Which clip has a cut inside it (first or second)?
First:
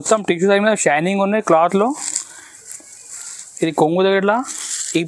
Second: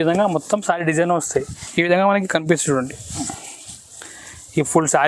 second